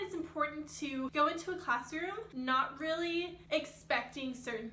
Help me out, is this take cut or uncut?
uncut